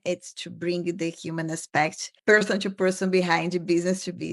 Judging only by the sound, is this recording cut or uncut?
uncut